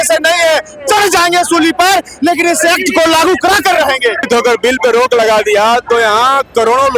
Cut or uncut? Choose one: cut